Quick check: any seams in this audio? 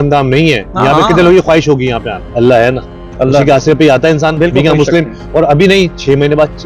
yes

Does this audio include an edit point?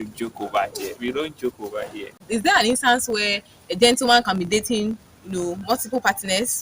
yes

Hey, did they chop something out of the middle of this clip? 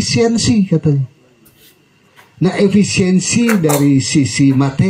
no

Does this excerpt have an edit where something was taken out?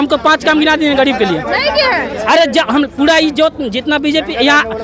no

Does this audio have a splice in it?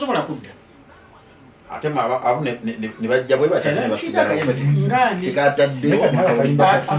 no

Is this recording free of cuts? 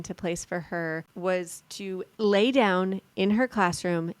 no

